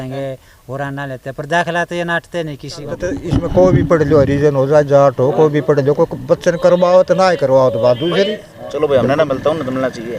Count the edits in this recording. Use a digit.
2